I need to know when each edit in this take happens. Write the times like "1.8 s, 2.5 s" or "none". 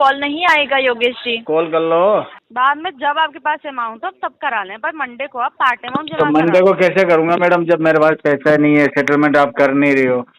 2.4 s